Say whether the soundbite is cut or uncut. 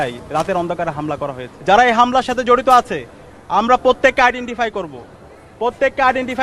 cut